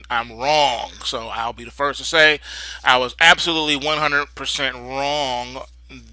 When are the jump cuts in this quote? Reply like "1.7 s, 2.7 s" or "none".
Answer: 1.6 s